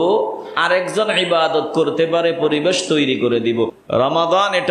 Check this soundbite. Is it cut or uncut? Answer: cut